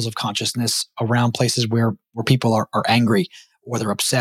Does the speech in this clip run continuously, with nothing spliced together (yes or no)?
yes